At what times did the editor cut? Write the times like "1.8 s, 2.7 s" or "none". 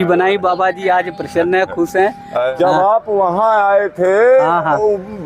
2.5 s